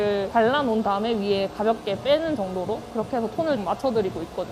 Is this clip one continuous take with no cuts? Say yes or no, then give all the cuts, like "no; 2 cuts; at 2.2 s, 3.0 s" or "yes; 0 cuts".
no; 1 cut; at 3.6 s